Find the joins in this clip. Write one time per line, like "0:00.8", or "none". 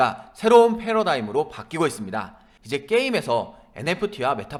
none